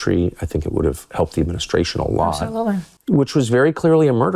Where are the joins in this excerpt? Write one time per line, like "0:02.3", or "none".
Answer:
0:02.9